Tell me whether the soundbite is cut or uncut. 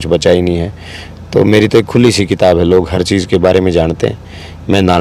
uncut